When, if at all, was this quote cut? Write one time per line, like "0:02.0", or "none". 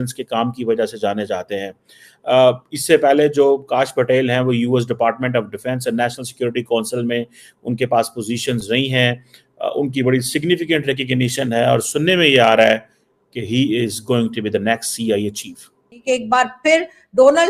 0:16.0